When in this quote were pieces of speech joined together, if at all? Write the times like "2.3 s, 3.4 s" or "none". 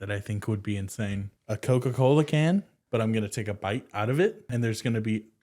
1.3 s, 2.8 s, 4.4 s